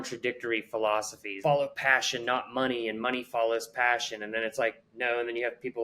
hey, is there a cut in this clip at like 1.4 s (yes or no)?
yes